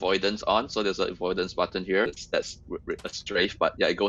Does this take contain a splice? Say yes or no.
yes